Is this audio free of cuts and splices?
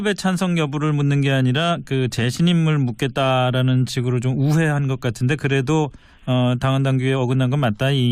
no; 1 cut; at 4.4 s

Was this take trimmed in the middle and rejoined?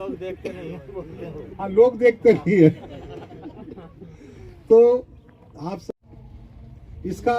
yes; 1 cut; at 5.8 s

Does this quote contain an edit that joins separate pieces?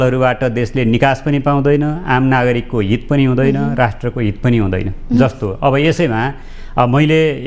no; 0 cuts

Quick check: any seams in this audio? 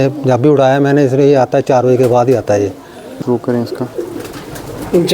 yes; 1 cut; at 3.2 s

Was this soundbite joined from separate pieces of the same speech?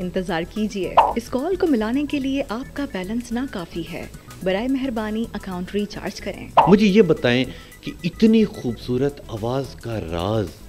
yes; 2 cuts; at 1.0 s, 6.5 s

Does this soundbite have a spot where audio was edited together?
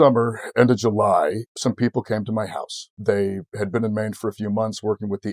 yes; 2 cuts; at 1.5 s, 2.9 s

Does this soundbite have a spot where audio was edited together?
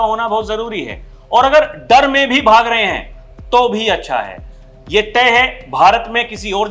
no; 0 cuts

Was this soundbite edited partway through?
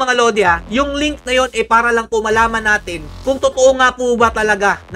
no; 0 cuts

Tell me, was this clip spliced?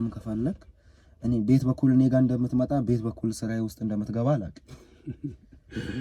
no; 0 cuts

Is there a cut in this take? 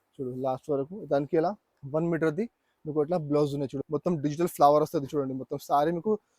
yes; 1 cut; at 3.8 s

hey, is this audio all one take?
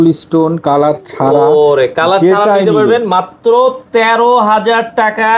yes; 0 cuts

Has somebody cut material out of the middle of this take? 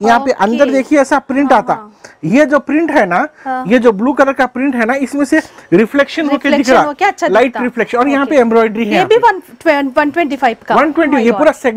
no; 0 cuts

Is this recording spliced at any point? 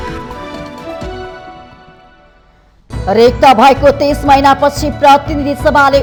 no; 0 cuts

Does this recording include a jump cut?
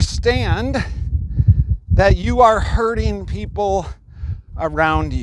no; 0 cuts

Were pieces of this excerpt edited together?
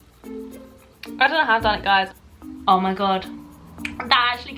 yes; 1 cut; at 2.2 s

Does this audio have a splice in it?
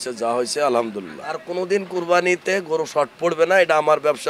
yes; 1 cut; at 1.4 s

